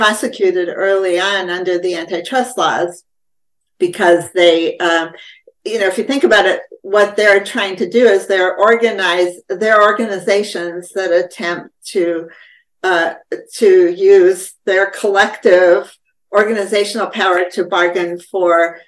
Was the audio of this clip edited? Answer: no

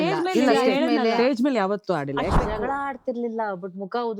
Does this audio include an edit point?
yes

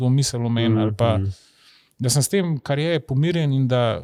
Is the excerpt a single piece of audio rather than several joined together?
yes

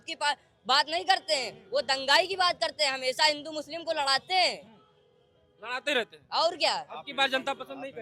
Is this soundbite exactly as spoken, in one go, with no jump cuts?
yes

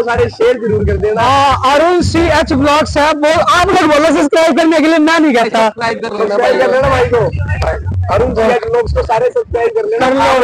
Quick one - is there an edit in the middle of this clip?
no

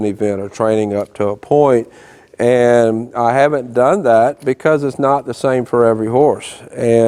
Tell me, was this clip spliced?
no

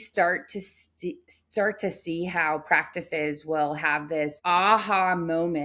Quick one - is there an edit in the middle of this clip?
yes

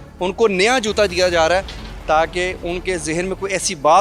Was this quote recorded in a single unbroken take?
yes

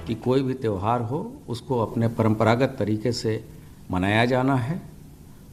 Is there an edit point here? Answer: no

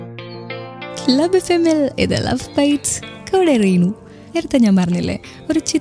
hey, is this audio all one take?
no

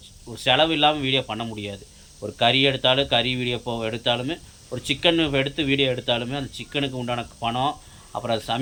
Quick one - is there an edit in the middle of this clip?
no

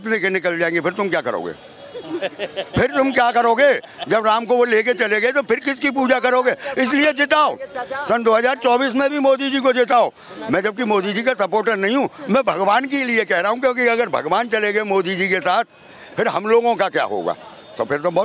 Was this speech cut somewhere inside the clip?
no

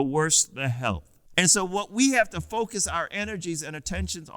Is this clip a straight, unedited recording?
no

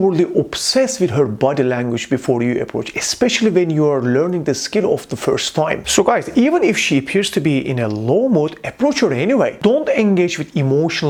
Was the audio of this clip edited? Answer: no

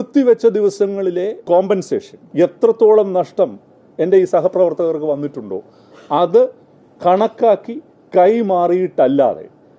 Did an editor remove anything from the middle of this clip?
yes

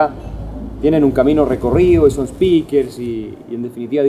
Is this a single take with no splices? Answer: no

